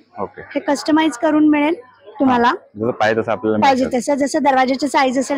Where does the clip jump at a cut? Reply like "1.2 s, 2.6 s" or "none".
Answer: none